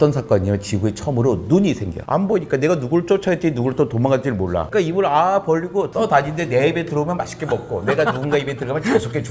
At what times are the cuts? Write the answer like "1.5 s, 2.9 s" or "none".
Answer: 2.0 s, 4.7 s, 5.9 s